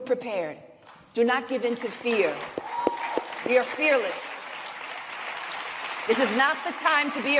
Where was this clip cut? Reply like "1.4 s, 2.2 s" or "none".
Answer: none